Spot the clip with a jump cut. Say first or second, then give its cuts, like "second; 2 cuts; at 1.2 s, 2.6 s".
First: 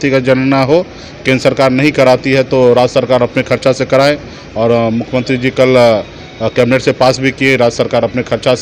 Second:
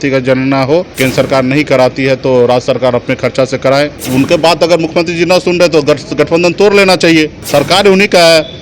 second; 3 cuts; at 0.9 s, 4.0 s, 7.5 s